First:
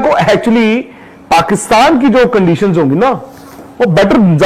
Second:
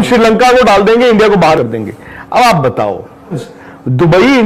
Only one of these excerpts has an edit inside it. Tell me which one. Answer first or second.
second